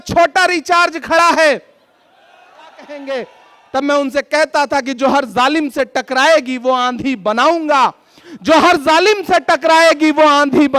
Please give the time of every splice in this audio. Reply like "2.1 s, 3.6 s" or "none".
3.0 s